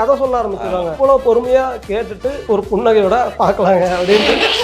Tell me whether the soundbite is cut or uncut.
cut